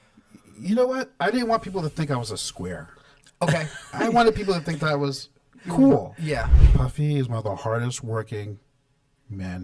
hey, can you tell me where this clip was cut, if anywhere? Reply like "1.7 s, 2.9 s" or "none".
6.5 s